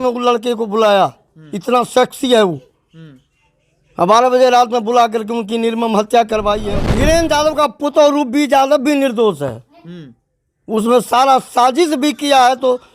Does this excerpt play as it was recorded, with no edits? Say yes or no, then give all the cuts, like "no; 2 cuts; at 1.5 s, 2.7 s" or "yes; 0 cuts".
no; 1 cut; at 6.9 s